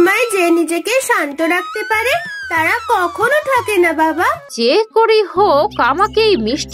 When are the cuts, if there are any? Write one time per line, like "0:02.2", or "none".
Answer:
0:04.5

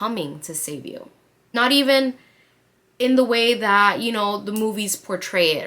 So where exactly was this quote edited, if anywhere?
0:01.3

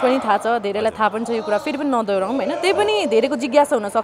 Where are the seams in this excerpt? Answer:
none

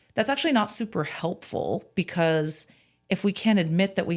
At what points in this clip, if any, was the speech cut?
none

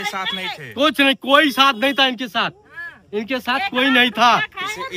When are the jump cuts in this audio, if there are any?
none

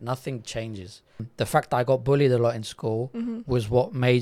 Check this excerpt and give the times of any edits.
0:01.2

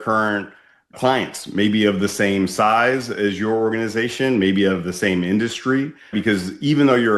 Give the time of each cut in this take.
0:06.1

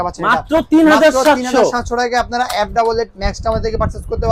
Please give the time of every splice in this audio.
none

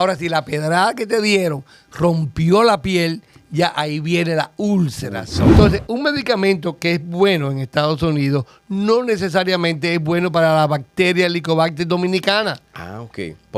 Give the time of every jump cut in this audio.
0:05.5

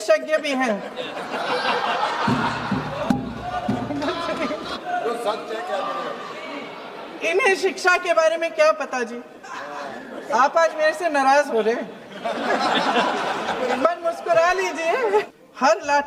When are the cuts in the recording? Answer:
0:04.7
0:09.9
0:15.3

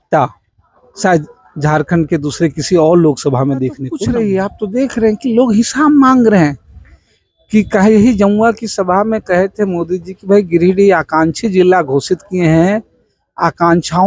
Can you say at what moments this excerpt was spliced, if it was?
0:03.9

